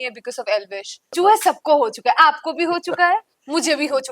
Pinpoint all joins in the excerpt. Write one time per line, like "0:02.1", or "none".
0:01.0